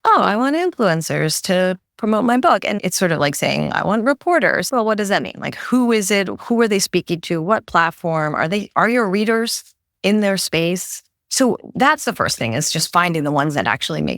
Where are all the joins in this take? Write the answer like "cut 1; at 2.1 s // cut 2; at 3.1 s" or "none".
cut 1; at 3.2 s // cut 2; at 4.7 s

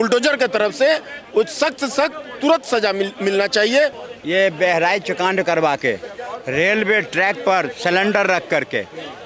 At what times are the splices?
cut 1; at 4.0 s

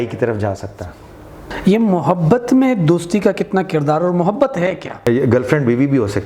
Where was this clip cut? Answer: cut 1; at 1.5 s // cut 2; at 5.1 s

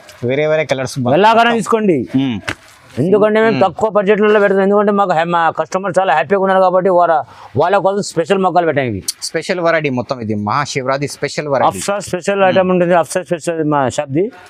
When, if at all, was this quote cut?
none

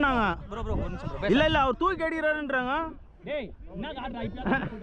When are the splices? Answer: none

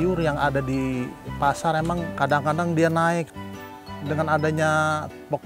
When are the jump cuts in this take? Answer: cut 1; at 2.2 s // cut 2; at 3.8 s

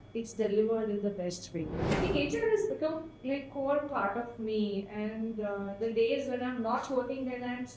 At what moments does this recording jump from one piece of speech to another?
cut 1; at 1.9 s

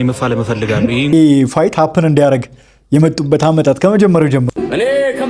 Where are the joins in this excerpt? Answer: cut 1; at 1.1 s // cut 2; at 4.5 s

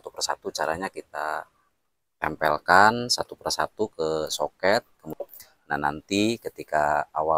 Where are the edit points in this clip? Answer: cut 1; at 5.2 s

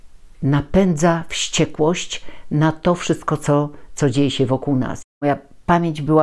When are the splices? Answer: cut 1; at 5.1 s

